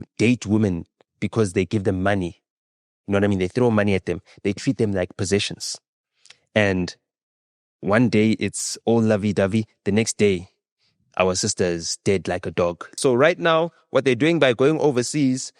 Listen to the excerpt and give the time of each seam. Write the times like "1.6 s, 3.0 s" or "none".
12.9 s